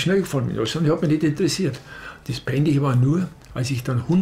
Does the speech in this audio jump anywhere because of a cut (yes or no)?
no